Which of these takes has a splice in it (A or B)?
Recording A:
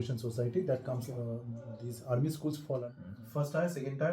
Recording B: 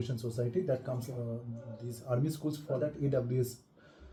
A